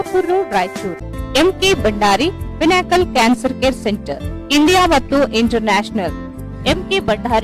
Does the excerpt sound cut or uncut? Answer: cut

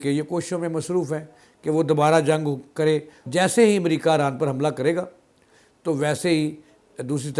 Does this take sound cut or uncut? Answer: cut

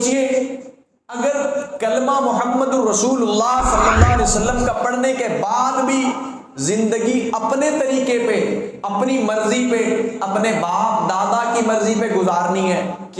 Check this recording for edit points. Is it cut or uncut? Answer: uncut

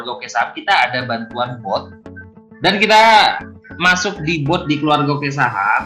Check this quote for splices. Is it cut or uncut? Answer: uncut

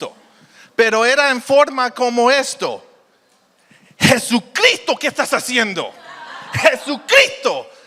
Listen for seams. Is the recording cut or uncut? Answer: uncut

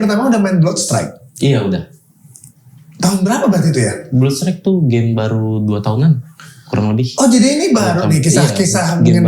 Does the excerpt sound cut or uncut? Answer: uncut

